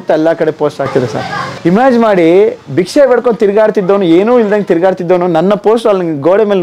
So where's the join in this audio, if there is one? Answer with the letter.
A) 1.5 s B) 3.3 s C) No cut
A